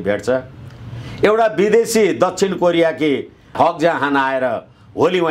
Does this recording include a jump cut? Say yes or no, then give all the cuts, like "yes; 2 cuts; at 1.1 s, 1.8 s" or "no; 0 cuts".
yes; 1 cut; at 3.5 s